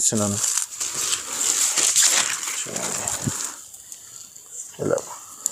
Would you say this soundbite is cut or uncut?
uncut